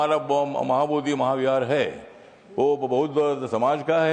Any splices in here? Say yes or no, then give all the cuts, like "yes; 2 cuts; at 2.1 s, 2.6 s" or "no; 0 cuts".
no; 0 cuts